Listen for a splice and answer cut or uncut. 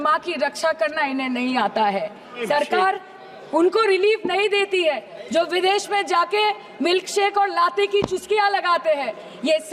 cut